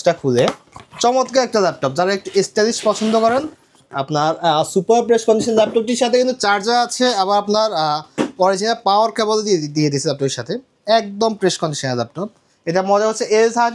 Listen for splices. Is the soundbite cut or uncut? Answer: uncut